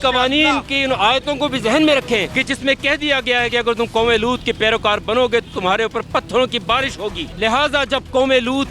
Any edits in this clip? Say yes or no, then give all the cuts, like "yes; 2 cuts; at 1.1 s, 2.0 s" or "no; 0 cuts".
yes; 2 cuts; at 2.3 s, 7.2 s